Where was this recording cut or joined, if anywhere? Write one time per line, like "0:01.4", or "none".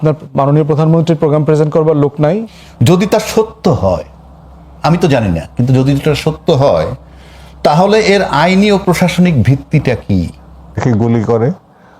0:02.5
0:10.8